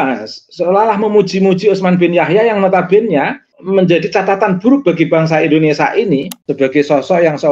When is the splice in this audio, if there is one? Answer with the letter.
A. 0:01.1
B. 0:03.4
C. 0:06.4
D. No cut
C